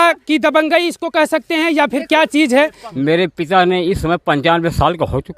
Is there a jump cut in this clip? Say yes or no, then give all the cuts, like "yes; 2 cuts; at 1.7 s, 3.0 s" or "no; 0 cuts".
yes; 1 cut; at 2.8 s